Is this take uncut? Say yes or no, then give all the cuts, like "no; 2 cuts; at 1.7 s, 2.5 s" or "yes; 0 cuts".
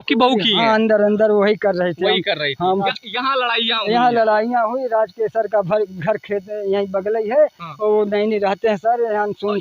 no; 1 cut; at 2.8 s